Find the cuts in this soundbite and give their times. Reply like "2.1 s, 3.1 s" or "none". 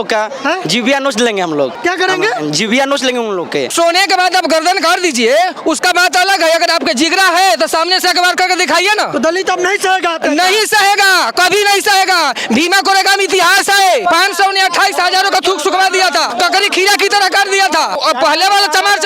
1.8 s, 3.7 s, 14.0 s, 16.3 s, 18.0 s